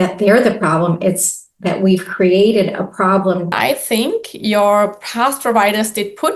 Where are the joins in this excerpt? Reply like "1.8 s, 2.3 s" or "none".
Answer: 3.5 s